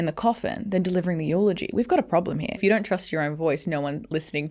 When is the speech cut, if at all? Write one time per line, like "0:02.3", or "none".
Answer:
0:02.6